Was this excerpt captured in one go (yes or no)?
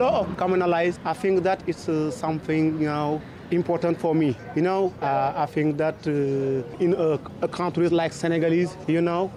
yes